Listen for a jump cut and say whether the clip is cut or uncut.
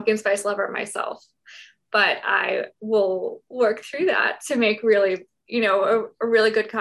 uncut